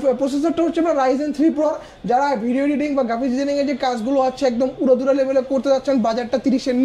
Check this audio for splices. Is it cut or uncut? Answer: uncut